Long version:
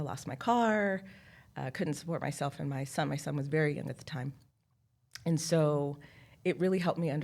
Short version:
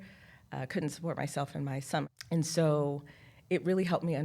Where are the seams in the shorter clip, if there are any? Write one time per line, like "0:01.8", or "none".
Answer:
0:02.0